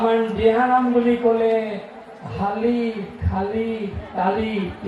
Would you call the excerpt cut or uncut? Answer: uncut